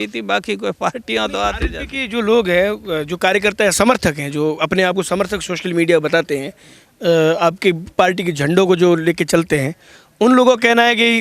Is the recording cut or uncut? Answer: uncut